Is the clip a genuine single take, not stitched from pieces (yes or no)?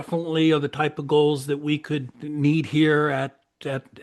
no